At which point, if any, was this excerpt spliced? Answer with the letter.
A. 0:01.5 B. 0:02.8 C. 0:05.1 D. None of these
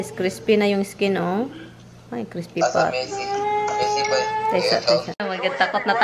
C